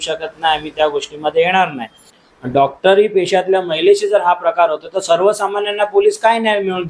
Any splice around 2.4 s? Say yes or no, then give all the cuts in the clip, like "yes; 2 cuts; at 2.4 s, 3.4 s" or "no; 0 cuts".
yes; 1 cut; at 2.4 s